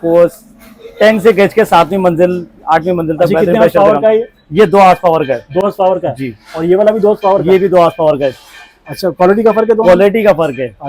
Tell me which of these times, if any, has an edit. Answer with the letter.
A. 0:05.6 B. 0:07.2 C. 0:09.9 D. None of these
D